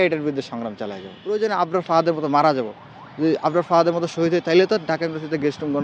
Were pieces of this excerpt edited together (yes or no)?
yes